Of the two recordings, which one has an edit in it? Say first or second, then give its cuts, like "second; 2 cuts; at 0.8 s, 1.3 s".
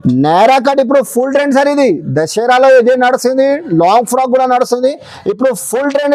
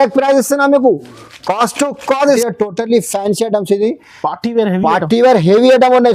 second; 1 cut; at 2.2 s